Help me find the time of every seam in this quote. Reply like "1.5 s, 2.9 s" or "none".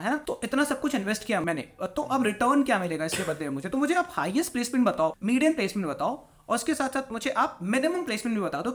4.9 s